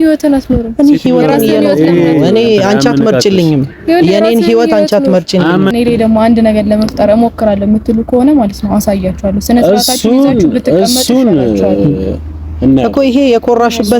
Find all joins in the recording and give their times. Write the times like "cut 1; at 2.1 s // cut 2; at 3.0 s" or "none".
cut 1; at 5.7 s